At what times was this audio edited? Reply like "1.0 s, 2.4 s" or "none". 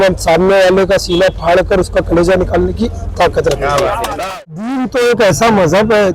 4.2 s